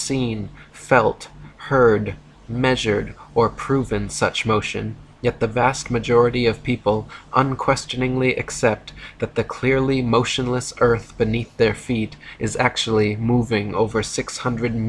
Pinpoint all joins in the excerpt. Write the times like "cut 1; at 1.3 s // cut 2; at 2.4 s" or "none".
cut 1; at 4.7 s